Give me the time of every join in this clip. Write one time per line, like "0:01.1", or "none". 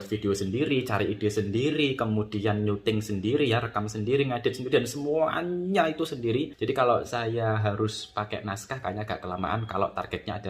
0:06.5